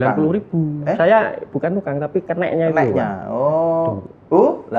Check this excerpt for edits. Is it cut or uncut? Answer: uncut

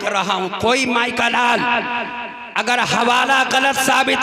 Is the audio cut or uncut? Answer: uncut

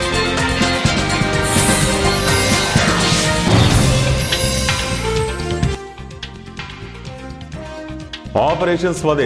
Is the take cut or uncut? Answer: uncut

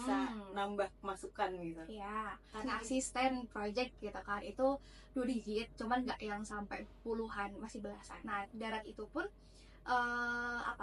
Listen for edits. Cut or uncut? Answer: cut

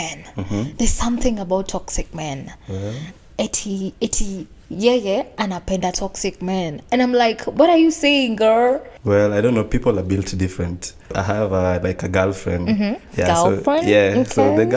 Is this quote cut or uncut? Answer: cut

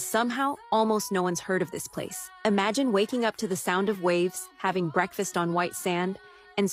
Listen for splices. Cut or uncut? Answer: uncut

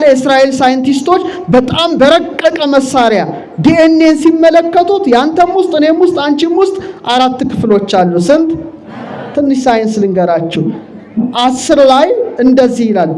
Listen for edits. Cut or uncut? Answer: uncut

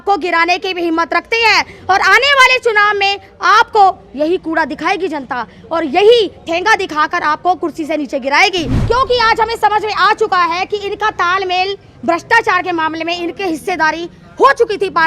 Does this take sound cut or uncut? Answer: cut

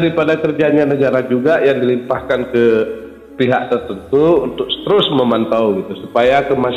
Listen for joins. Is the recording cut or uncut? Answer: uncut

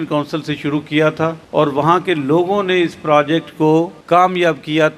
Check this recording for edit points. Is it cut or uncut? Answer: cut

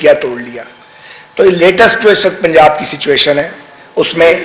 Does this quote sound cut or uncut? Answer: uncut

